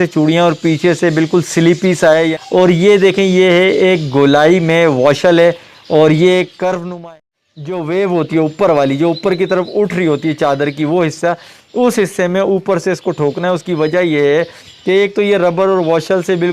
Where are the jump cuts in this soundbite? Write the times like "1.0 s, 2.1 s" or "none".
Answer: 2.4 s, 7.0 s